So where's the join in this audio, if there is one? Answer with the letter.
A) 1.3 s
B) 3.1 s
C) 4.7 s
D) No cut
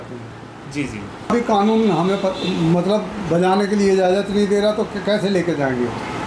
A